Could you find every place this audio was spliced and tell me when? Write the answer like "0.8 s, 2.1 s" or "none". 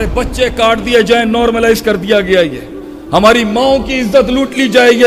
none